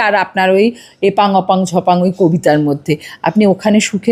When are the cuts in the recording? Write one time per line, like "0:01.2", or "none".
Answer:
none